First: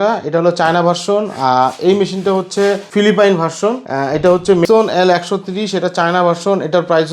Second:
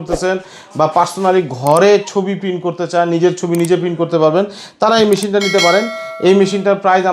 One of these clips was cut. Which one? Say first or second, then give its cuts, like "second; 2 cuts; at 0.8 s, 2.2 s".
first; 3 cuts; at 2.8 s, 3.9 s, 4.7 s